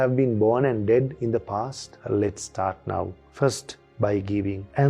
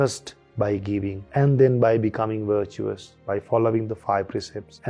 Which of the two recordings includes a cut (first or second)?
first